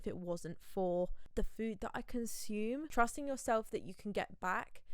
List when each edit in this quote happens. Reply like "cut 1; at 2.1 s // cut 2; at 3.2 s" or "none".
cut 1; at 1.2 s // cut 2; at 2.9 s